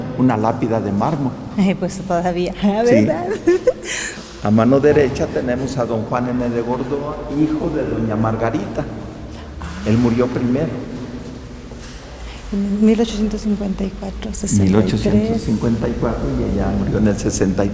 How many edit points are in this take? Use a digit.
0